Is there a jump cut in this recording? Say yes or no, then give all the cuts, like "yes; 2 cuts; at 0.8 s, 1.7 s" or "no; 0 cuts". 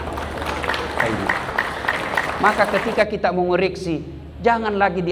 yes; 1 cut; at 2.4 s